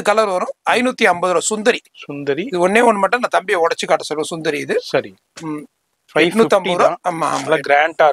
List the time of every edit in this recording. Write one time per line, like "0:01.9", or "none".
none

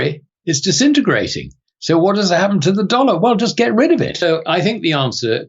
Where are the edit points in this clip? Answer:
0:04.2

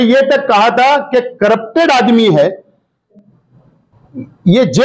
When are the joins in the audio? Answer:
0:02.9

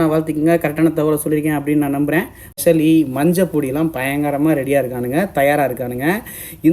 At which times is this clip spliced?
0:02.6

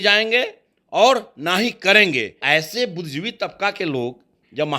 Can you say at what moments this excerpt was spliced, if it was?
0:02.4

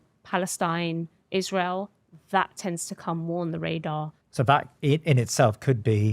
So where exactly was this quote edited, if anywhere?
0:04.2

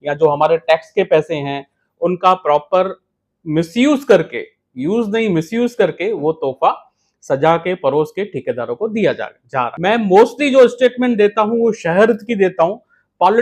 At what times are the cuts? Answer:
0:09.7

